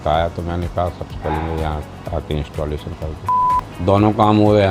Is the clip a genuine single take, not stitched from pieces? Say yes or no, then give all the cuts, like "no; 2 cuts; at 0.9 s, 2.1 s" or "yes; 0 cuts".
no; 1 cut; at 3.5 s